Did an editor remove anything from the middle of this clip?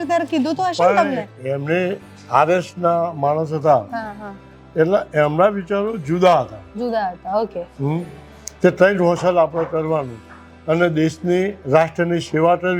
no; 0 cuts

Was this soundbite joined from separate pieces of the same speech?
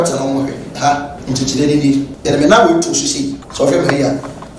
yes; 3 cuts; at 1.2 s, 2.1 s, 3.4 s

